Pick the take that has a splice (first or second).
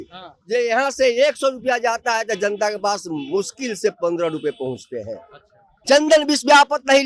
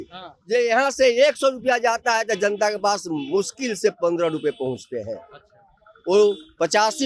first